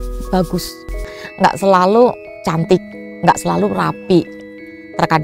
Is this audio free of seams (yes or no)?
no